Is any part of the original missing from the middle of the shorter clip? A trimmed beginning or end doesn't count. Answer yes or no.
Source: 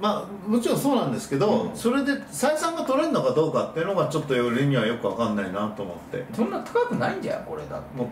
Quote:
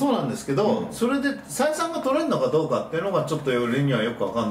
no